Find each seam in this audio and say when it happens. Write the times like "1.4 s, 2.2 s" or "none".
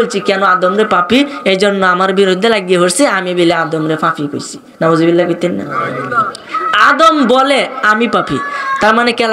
none